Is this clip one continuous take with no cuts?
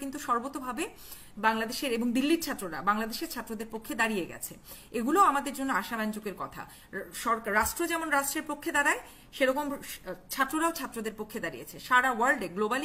yes; 0 cuts

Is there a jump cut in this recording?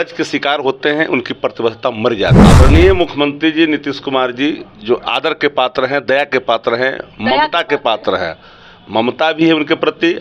yes; 1 cut; at 2.4 s

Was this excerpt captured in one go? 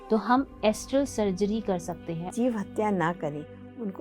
no; 1 cut; at 2.3 s

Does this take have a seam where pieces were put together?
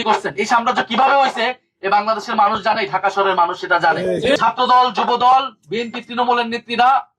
yes; 1 cut; at 4.4 s

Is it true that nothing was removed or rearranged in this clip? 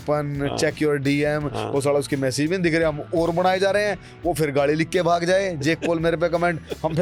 yes; 0 cuts

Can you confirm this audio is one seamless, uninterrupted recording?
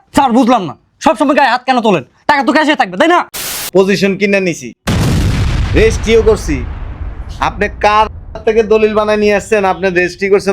no; 1 cut; at 3.4 s

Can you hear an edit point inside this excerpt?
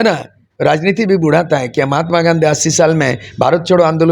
no; 0 cuts

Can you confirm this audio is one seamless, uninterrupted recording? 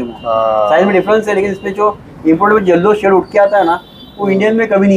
yes; 0 cuts

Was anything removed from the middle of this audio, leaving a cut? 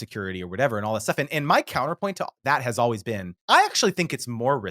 yes; 1 cut; at 3.4 s

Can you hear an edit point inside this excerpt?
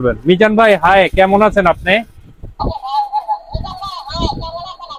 no; 0 cuts

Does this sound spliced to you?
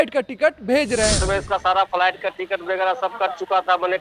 yes; 1 cut; at 1.1 s

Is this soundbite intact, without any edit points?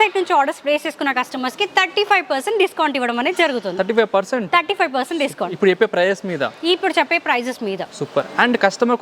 yes; 0 cuts

